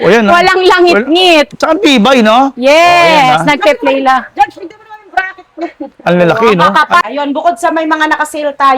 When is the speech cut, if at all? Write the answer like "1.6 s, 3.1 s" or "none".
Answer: 7.0 s